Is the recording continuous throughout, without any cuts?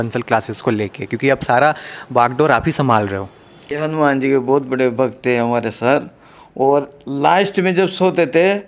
no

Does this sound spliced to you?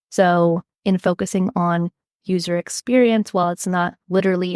no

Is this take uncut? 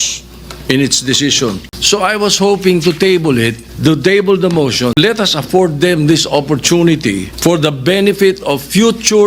no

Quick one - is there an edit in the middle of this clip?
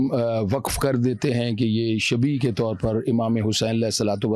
no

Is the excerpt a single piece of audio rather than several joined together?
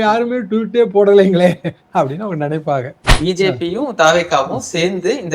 no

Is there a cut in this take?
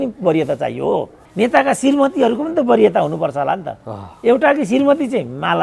yes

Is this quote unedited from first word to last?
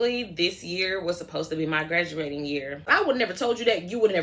no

